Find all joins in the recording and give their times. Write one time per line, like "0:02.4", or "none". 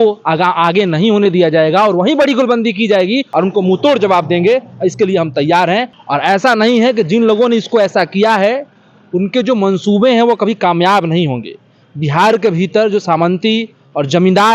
0:03.3
0:05.9

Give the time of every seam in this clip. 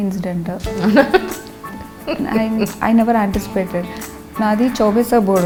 none

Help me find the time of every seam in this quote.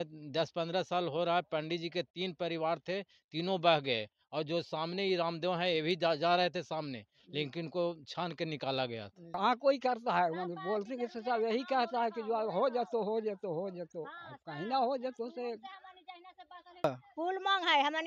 0:09.3
0:16.8

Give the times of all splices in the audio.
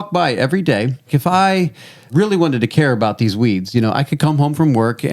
0:01.1
0:02.1

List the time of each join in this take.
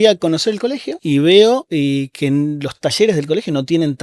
0:00.9
0:01.7

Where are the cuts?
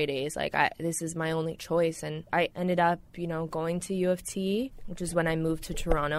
0:02.3

